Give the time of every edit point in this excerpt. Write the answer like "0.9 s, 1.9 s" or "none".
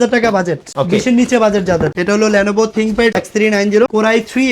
1.9 s, 3.2 s